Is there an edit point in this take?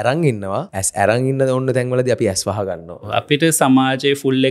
yes; 1 cut; at 3.0 s

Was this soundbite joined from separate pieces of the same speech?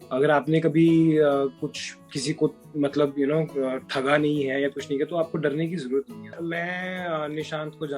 yes; 1 cut; at 6.3 s

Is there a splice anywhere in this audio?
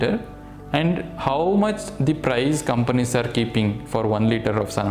no; 0 cuts

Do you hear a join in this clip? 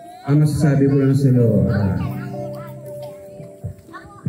no; 0 cuts

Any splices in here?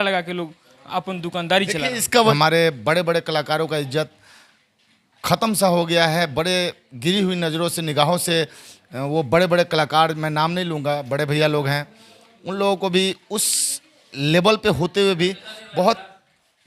yes; 1 cut; at 2.3 s

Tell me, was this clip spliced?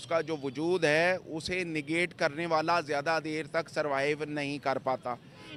no; 0 cuts

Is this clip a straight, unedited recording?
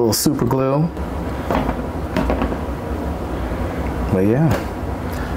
no; 1 cut; at 1.0 s

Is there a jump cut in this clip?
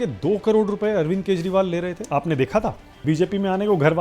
yes; 2 cuts; at 2.0 s, 2.9 s

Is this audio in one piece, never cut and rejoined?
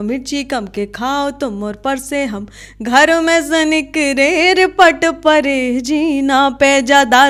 yes; 0 cuts

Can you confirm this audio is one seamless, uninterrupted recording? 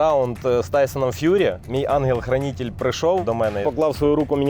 no; 2 cuts; at 1.6 s, 3.5 s

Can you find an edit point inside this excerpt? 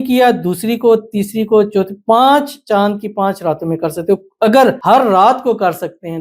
yes; 1 cut; at 4.8 s

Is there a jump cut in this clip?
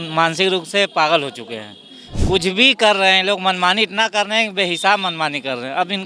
no; 0 cuts

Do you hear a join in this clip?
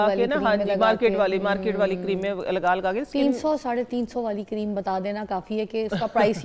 no; 0 cuts

